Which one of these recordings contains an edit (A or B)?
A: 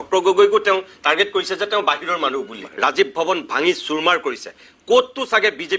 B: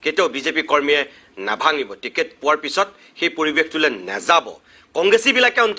A